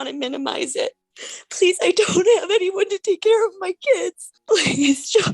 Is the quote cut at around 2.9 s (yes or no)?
no